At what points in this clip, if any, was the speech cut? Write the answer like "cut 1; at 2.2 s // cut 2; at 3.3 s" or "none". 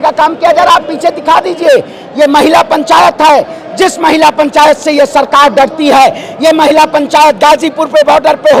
none